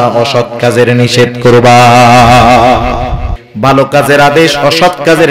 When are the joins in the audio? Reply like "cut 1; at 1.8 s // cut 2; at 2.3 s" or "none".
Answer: cut 1; at 3.4 s